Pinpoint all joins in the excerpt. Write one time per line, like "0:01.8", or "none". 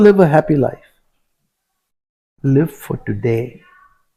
none